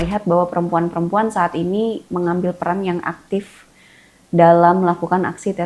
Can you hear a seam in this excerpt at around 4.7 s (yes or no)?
no